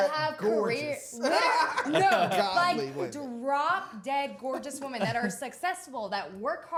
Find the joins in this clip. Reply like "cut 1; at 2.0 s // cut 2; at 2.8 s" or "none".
none